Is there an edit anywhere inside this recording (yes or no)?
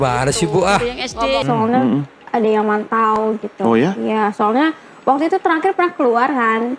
yes